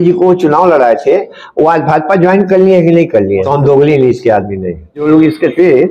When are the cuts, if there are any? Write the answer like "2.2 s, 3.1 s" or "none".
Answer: 3.4 s, 5.0 s